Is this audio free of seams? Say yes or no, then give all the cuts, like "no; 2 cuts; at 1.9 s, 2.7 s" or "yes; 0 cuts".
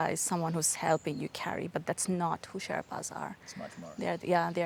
yes; 0 cuts